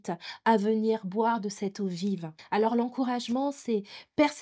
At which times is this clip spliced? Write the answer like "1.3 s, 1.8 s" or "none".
2.3 s